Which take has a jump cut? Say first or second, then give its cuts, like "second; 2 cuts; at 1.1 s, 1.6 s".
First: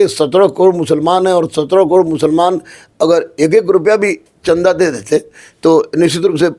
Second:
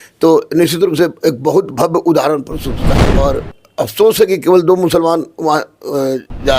second; 1 cut; at 3.1 s